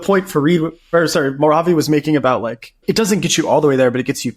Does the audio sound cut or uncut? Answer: cut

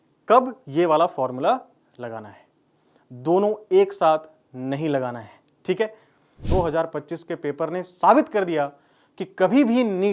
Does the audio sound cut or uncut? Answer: cut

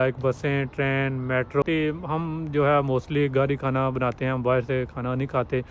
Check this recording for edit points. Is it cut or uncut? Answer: cut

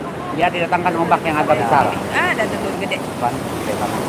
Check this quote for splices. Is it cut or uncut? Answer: uncut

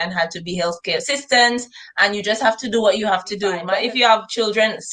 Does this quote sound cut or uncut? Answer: cut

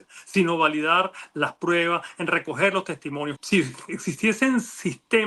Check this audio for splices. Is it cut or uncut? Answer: cut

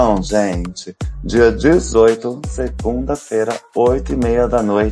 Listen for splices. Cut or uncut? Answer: cut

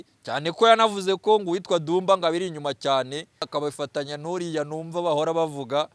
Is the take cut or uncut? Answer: cut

